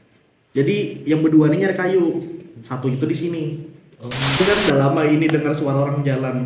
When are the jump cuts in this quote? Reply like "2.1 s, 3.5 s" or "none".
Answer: 4.4 s